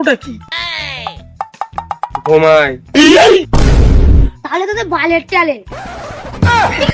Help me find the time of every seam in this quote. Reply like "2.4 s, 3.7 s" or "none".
none